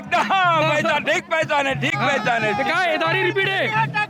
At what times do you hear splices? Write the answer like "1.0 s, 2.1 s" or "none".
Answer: none